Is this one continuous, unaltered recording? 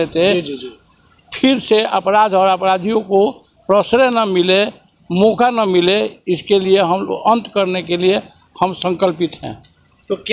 yes; 0 cuts

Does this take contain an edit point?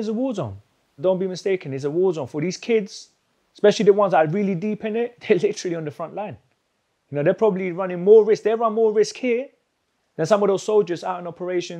yes; 2 cuts; at 1.0 s, 5.2 s

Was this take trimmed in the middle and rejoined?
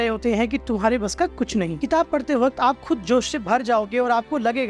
no; 0 cuts

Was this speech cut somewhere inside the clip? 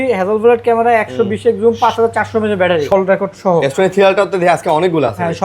yes; 1 cut; at 2.9 s

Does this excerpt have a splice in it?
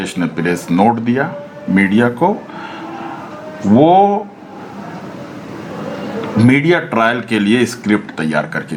no; 0 cuts

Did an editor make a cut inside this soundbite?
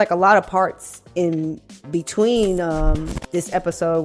no; 0 cuts

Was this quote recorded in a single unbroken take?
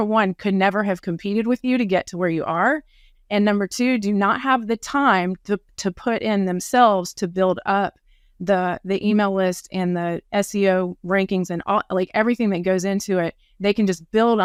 yes; 0 cuts

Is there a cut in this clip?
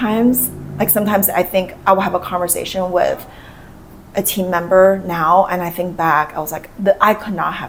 no; 0 cuts

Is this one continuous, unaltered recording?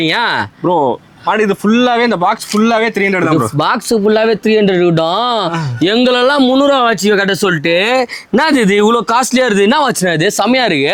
yes; 0 cuts

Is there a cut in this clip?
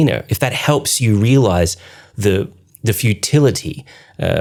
no; 0 cuts

